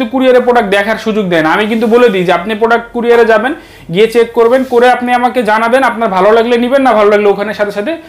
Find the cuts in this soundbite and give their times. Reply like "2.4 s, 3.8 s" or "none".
none